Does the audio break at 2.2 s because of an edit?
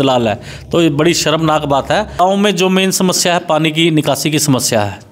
yes; 1 cut; at 2.2 s

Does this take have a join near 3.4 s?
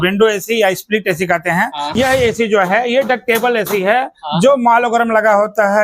no; 1 cut; at 1.8 s

